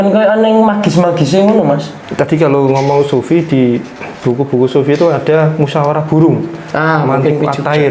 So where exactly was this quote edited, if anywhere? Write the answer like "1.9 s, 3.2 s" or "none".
2.0 s